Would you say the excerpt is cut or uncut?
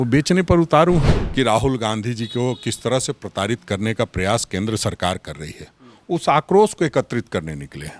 cut